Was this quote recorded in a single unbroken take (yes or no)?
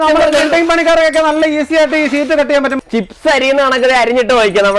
no